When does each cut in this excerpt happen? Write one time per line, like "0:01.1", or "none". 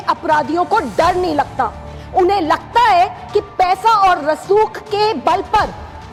none